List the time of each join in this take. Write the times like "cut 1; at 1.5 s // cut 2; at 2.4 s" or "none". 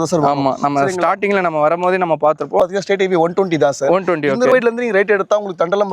cut 1; at 2.6 s // cut 2; at 4.5 s